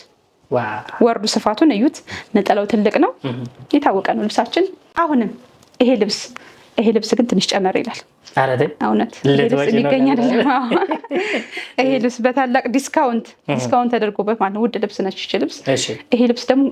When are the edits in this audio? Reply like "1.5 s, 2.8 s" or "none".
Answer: none